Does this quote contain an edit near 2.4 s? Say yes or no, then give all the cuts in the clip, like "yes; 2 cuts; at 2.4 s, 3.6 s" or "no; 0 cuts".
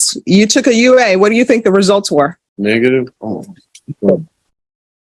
yes; 1 cut; at 2.4 s